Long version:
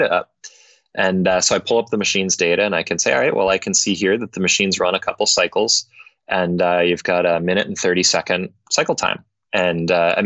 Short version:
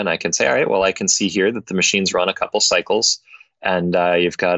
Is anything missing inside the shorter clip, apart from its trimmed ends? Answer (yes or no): no